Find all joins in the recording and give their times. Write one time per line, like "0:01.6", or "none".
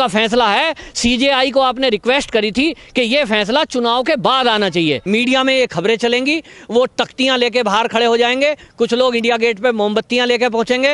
0:05.0